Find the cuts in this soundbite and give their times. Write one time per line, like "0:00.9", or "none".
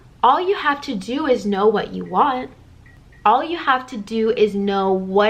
0:03.0